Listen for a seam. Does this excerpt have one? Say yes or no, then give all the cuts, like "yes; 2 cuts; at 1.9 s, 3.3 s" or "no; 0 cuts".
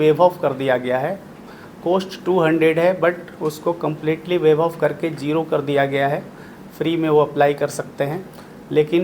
no; 0 cuts